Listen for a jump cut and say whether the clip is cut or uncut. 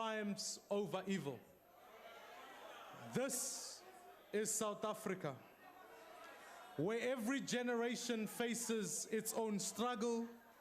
cut